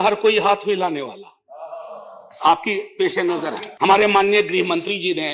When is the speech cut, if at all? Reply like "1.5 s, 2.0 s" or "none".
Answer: 3.6 s